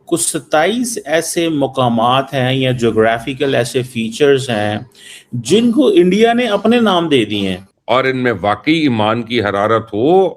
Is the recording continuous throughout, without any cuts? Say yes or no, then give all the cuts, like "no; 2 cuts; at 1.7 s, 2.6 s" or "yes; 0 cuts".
no; 1 cut; at 7.7 s